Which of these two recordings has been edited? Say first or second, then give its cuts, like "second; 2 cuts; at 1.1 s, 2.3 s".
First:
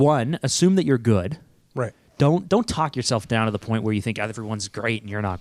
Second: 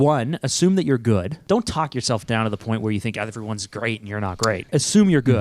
second; 2 cuts; at 1.4 s, 4.6 s